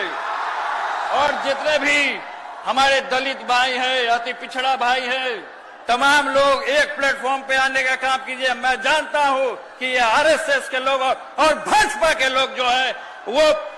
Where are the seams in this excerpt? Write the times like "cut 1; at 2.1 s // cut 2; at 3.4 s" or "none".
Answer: none